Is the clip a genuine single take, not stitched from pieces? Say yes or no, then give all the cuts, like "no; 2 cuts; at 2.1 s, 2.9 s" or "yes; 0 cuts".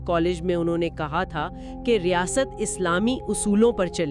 yes; 0 cuts